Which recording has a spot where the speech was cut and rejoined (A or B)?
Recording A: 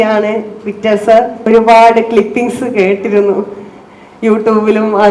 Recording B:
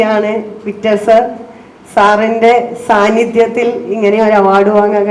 A